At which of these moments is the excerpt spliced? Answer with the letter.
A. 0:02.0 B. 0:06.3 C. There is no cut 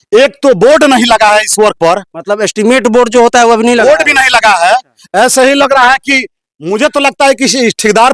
C